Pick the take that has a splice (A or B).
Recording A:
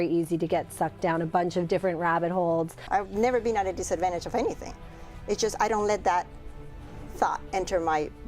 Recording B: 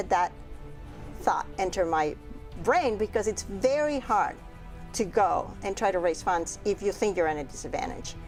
A